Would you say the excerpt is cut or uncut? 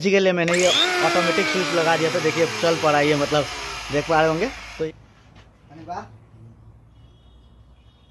cut